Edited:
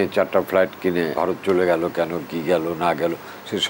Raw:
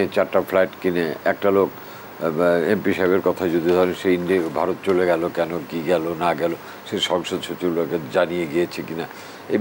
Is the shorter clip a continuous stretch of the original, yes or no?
no